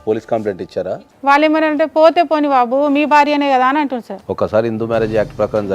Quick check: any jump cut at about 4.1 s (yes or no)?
yes